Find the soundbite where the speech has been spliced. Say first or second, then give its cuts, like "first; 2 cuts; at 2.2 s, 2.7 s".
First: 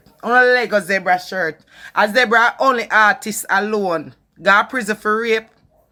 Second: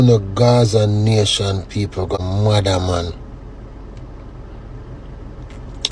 second; 1 cut; at 2.2 s